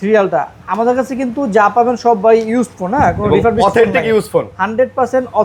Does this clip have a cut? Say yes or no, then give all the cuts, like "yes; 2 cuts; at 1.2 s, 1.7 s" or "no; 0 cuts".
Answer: no; 0 cuts